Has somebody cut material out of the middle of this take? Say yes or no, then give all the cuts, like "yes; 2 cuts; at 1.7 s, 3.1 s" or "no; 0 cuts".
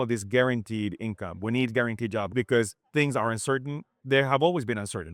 yes; 2 cuts; at 2.3 s, 3.9 s